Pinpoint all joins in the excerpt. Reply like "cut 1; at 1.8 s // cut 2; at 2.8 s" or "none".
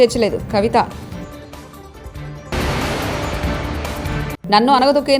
cut 1; at 2.5 s // cut 2; at 4.3 s